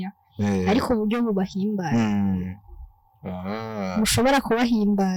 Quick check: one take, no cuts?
yes; 0 cuts

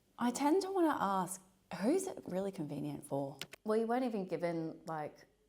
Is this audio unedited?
no; 1 cut; at 3.5 s

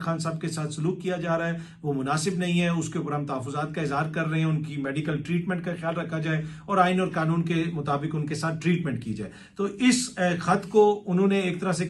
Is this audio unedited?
yes; 0 cuts

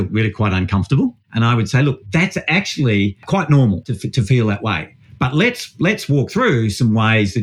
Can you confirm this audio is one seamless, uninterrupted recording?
no; 3 cuts; at 1.2 s, 3.2 s, 3.9 s

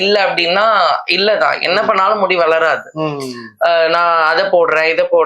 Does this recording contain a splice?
no; 0 cuts

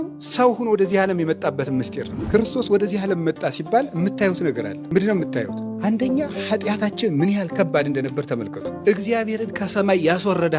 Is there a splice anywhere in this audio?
yes; 4 cuts; at 2.1 s, 4.7 s, 5.6 s, 8.7 s

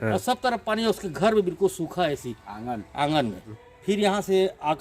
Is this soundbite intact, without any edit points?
no; 1 cut; at 3.7 s

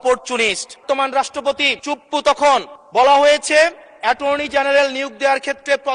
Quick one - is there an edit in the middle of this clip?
yes; 4 cuts; at 0.8 s, 1.7 s, 2.8 s, 3.9 s

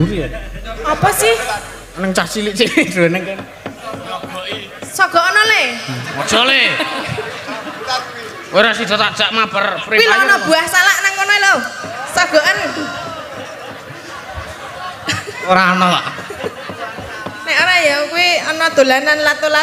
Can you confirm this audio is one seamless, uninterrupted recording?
yes; 0 cuts

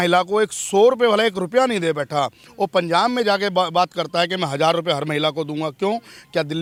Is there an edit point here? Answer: no; 0 cuts

